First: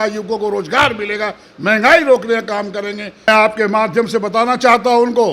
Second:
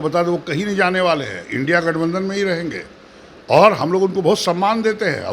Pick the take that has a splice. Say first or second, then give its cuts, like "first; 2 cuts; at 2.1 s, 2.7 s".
first; 1 cut; at 3.3 s